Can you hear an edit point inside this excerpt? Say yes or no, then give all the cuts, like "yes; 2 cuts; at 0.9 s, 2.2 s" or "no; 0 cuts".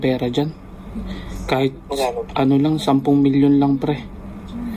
no; 0 cuts